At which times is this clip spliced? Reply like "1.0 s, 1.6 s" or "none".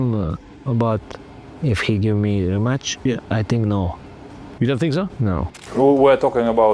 5.6 s